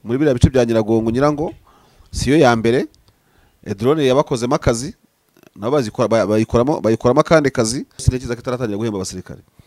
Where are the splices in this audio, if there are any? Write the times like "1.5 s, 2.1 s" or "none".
8.0 s